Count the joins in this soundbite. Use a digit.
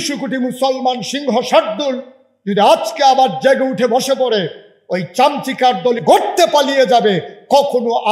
1